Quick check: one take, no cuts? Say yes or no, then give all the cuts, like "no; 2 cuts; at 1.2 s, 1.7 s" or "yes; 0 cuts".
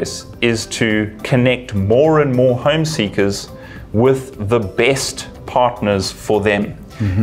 yes; 0 cuts